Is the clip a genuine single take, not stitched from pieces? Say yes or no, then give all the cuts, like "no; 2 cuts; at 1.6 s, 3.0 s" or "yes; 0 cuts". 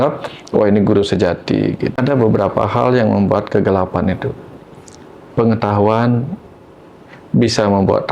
no; 1 cut; at 2.0 s